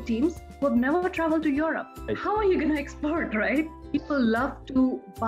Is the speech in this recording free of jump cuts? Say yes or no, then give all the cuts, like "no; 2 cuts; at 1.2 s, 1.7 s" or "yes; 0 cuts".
no; 2 cuts; at 1.9 s, 3.7 s